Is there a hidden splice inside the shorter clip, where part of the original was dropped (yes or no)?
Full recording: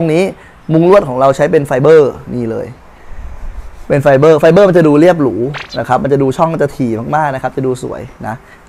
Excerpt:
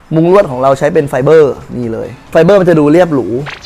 yes